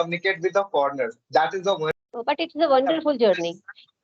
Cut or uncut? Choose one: cut